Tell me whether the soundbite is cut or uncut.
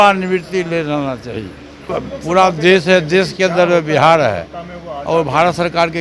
cut